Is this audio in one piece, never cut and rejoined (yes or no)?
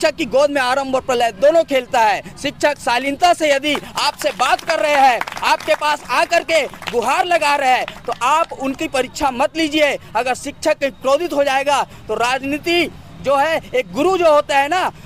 yes